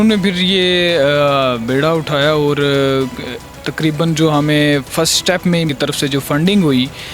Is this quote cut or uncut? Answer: cut